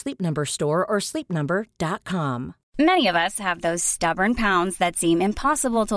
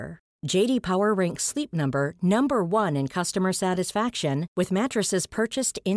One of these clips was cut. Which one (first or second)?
first